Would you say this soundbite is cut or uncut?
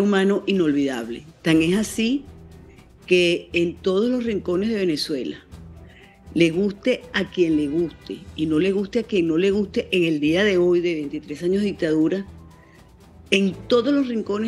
uncut